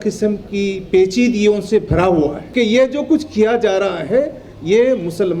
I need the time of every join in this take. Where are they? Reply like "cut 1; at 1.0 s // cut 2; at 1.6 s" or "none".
cut 1; at 2.4 s